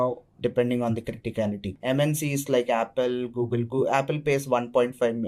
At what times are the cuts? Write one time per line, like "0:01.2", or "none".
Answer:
0:01.7